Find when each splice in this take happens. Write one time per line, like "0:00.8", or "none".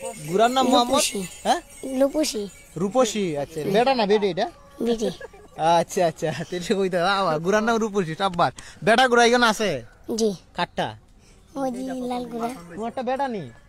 none